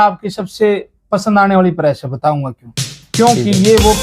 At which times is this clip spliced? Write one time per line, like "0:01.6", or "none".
none